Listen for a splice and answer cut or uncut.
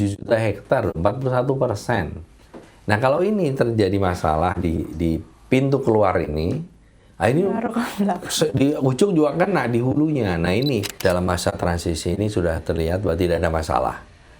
cut